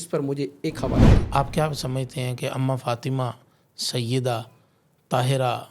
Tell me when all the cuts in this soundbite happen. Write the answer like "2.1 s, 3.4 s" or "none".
1.2 s